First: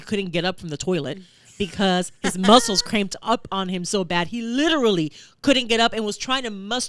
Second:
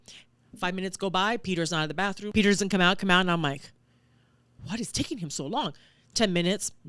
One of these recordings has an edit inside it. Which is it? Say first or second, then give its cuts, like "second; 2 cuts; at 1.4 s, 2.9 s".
second; 1 cut; at 2.2 s